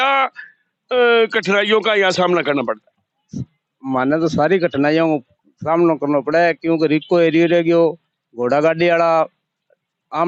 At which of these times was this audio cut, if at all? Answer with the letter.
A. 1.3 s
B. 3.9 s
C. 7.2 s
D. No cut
D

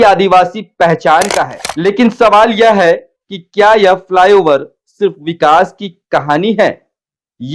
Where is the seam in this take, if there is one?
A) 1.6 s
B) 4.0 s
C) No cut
A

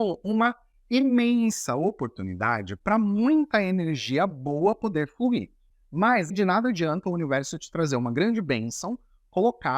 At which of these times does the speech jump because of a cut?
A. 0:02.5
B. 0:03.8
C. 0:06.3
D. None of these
C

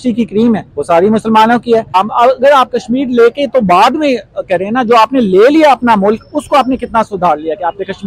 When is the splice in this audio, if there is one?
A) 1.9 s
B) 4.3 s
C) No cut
A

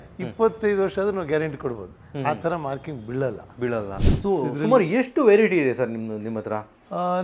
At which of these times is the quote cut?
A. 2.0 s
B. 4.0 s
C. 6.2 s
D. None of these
B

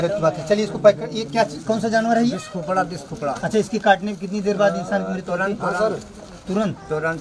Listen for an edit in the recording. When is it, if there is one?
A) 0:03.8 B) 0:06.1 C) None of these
C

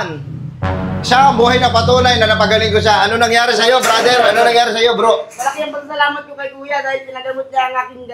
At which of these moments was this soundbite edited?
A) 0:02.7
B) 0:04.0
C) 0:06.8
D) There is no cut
D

